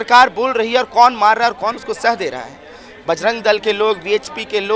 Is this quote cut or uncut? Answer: uncut